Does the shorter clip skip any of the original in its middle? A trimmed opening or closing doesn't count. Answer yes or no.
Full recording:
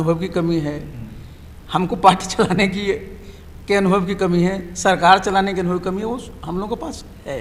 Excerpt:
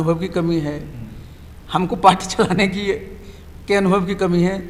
no